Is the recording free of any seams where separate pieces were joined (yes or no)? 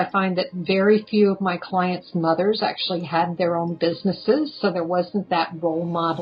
yes